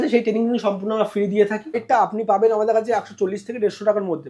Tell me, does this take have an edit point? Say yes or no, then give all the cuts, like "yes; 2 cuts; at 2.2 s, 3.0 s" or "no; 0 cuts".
yes; 1 cut; at 1.8 s